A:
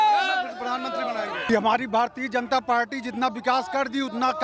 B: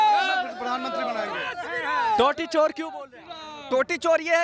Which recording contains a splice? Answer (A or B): A